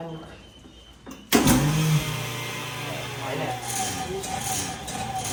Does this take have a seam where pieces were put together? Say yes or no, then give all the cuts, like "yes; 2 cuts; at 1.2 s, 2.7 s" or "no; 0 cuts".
no; 0 cuts